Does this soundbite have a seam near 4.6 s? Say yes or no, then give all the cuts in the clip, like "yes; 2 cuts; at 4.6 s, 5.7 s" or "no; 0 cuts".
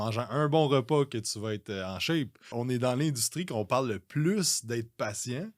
no; 1 cut; at 2.5 s